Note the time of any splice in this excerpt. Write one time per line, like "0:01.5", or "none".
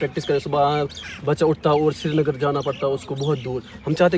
none